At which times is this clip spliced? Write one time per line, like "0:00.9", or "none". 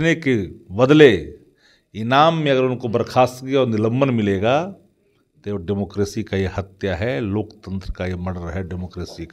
none